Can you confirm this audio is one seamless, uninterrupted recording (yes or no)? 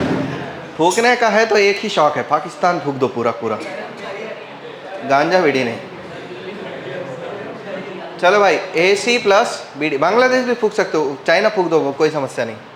yes